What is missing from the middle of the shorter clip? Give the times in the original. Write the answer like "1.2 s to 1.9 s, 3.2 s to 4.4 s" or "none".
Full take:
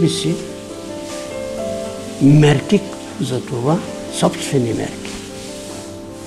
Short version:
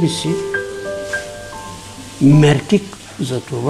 none